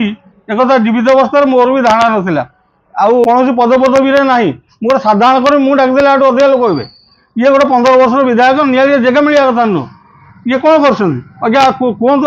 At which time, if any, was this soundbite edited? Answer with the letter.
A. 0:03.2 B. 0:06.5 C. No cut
A